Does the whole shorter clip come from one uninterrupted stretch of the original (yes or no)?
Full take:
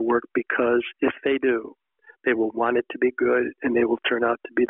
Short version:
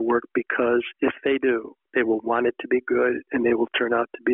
no